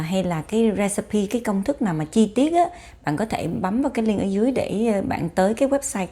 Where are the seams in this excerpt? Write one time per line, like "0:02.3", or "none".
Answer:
none